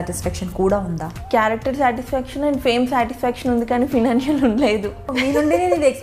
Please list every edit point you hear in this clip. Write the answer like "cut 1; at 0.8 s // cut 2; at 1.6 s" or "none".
cut 1; at 1.1 s // cut 2; at 5.1 s